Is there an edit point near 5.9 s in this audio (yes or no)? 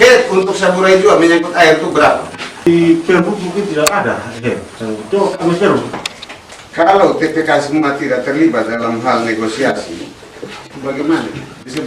yes